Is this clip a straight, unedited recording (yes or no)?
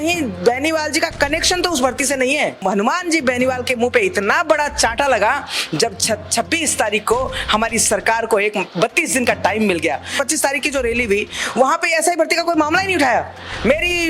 no